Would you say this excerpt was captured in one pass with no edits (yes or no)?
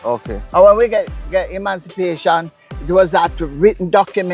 yes